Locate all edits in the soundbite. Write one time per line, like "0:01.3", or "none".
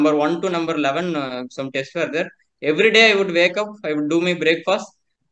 none